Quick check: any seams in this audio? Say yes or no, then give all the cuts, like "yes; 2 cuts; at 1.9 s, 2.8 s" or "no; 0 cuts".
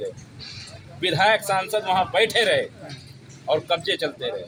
no; 0 cuts